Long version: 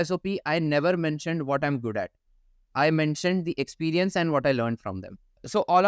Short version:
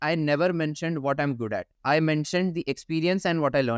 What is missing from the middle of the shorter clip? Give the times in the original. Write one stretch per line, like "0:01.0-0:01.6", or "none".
0:02.1-0:02.6